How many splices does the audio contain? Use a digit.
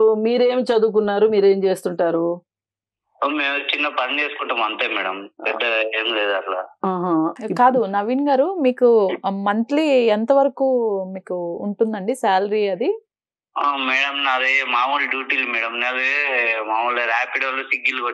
1